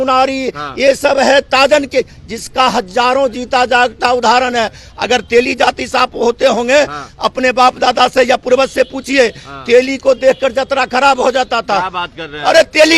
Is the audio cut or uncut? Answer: uncut